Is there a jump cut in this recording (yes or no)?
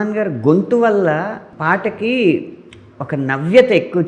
yes